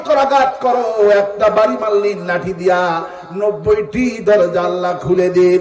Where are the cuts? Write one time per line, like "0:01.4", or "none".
none